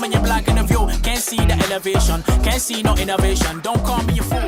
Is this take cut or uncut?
uncut